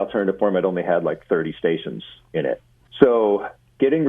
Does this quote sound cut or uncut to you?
cut